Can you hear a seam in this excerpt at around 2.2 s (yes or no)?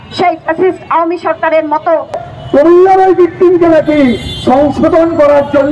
yes